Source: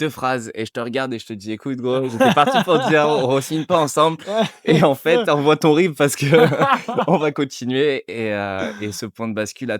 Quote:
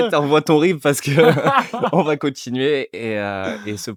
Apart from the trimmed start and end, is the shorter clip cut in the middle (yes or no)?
no